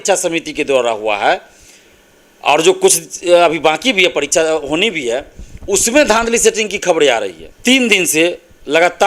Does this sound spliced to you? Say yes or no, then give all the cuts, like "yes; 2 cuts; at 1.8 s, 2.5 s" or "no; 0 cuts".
yes; 1 cut; at 7.4 s